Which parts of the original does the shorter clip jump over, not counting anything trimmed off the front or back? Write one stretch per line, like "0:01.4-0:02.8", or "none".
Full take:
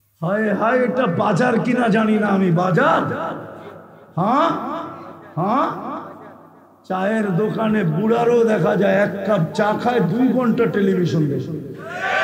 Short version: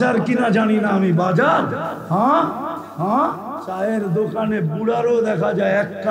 0:03.3-0:04.0
0:04.9-0:05.2
0:06.0-0:06.8